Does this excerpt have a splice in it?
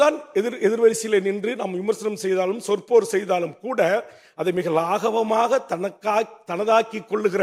no; 0 cuts

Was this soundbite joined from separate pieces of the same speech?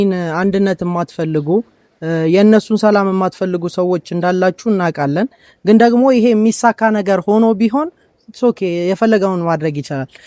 no; 0 cuts

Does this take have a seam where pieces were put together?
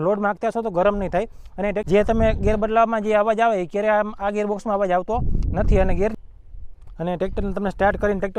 yes; 2 cuts; at 1.8 s, 6.1 s

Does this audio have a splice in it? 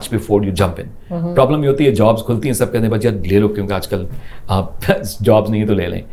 no; 0 cuts

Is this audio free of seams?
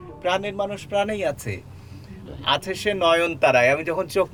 yes; 0 cuts

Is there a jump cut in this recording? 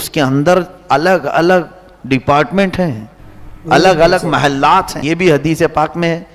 yes; 1 cut; at 5.0 s

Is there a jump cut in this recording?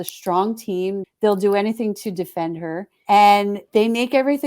yes; 3 cuts; at 1.0 s, 2.9 s, 3.6 s

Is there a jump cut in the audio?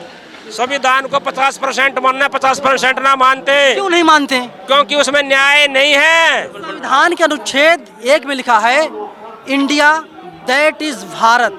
yes; 1 cut; at 6.7 s

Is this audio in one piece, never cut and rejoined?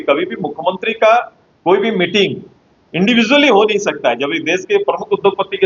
yes; 0 cuts

